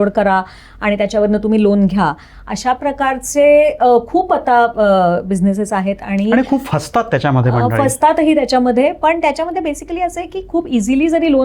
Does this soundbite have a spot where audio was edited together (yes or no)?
no